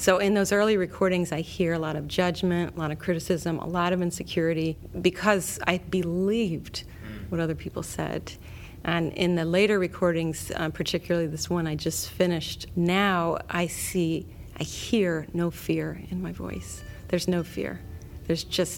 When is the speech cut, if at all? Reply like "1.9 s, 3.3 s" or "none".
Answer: 3.0 s, 4.9 s, 12.6 s

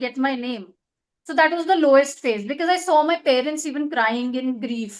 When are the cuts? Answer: none

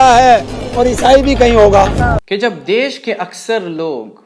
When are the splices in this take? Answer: 2.2 s

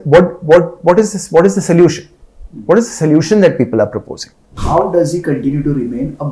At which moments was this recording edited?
4.5 s

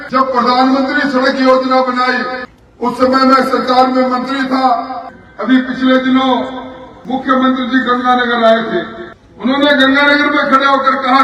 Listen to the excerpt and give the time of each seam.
5.0 s

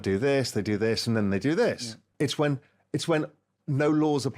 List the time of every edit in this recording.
2.0 s

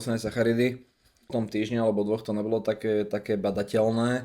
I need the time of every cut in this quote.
1.3 s

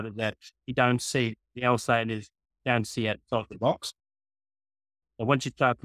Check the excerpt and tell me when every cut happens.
none

